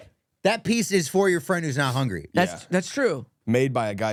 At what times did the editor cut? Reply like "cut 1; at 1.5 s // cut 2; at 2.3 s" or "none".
none